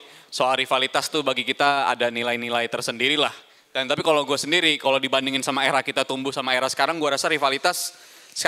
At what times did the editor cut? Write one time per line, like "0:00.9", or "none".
none